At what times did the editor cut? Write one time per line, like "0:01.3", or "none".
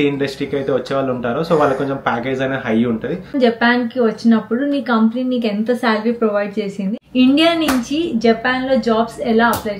0:03.3
0:06.9

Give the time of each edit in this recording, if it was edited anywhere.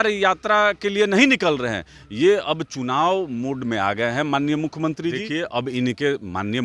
0:05.2

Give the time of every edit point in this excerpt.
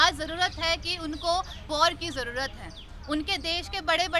0:01.7

